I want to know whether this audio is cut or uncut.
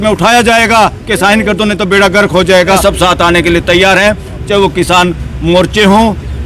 cut